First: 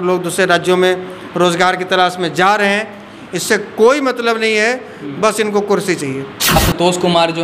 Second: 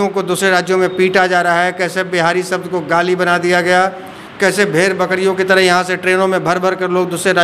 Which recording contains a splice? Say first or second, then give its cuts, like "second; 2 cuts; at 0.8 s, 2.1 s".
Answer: first; 1 cut; at 6.5 s